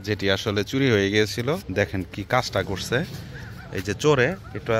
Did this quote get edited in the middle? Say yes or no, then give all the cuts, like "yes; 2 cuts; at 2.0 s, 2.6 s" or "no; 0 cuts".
yes; 1 cut; at 1.7 s